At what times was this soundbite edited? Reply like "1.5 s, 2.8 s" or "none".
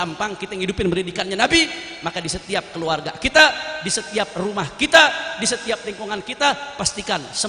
none

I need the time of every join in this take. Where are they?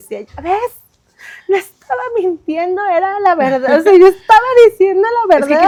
none

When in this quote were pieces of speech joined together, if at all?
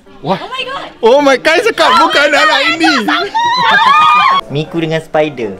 4.4 s

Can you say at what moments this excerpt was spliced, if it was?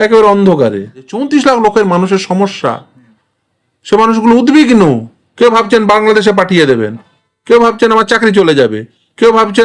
1.2 s

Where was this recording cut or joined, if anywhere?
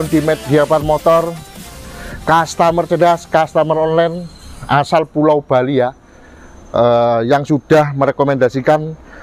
none

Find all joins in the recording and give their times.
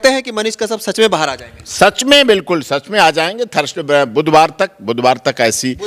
none

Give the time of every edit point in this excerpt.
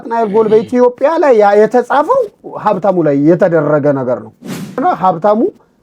4.8 s

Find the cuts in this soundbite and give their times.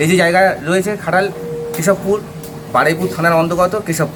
none

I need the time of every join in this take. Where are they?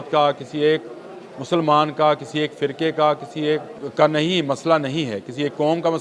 3.8 s

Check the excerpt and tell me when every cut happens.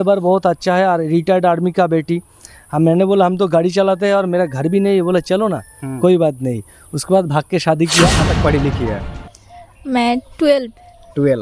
8.3 s

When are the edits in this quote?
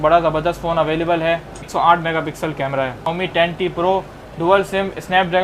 1.6 s, 3.1 s

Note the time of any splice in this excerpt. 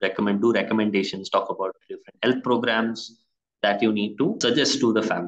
4.4 s

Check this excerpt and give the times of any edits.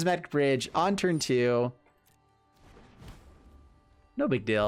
none

